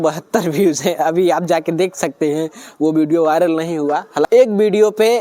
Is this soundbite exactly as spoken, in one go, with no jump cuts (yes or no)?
no